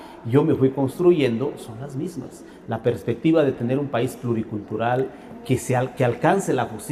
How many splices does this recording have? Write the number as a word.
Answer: zero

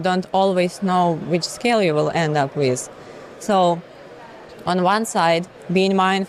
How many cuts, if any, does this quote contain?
zero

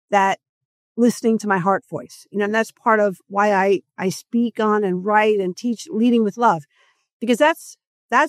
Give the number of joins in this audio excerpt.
zero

